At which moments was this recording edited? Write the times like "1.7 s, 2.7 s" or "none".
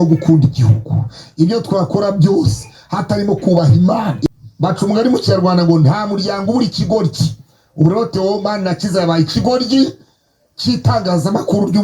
4.2 s